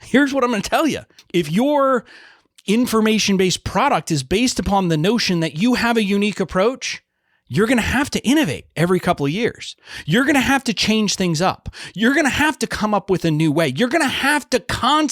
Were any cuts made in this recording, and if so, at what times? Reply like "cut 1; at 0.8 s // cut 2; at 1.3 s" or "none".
cut 1; at 1.1 s